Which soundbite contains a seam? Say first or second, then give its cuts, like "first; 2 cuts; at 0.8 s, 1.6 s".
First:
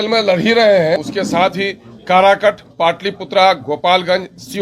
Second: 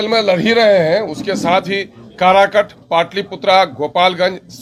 first; 1 cut; at 1.0 s